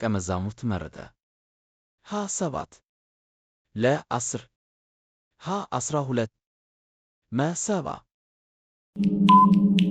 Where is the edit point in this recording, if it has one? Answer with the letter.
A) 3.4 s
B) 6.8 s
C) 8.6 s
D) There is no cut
C